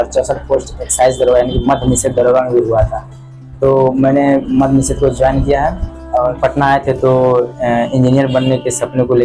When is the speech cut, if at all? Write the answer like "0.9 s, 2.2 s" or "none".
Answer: 6.4 s